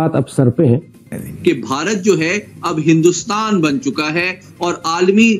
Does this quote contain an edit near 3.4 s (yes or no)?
no